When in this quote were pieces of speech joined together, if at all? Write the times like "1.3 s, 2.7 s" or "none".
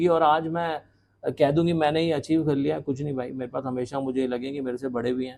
none